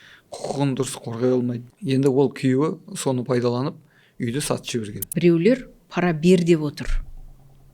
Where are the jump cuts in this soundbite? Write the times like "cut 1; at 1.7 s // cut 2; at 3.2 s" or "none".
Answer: cut 1; at 1.7 s // cut 2; at 5.1 s